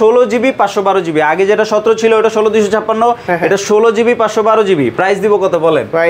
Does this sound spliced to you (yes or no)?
no